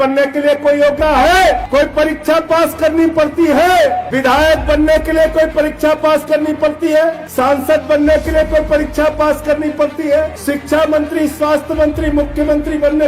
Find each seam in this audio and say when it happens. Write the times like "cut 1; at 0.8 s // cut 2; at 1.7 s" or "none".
cut 1; at 1.0 s // cut 2; at 1.6 s // cut 3; at 4.1 s // cut 4; at 7.2 s // cut 5; at 10.4 s